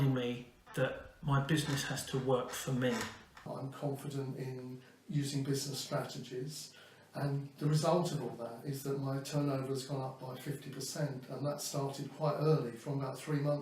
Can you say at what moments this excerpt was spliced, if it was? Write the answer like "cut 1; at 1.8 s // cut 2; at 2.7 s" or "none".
cut 1; at 3.5 s